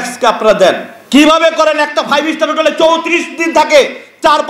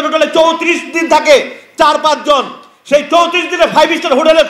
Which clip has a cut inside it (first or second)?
first